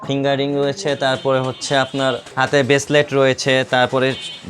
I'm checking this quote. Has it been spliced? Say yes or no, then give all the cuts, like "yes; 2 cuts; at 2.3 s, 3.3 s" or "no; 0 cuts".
yes; 1 cut; at 2.3 s